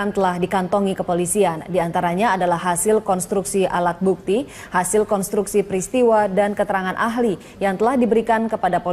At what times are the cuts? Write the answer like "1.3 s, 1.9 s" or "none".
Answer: none